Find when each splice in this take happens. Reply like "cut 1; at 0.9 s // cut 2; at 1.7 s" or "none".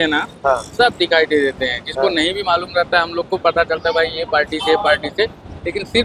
none